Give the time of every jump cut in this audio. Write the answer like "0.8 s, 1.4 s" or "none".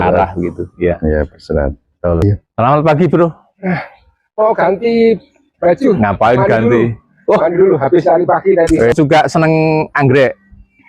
2.2 s, 8.9 s